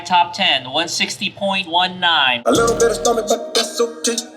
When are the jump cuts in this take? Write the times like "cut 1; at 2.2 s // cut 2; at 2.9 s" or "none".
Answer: cut 1; at 2.4 s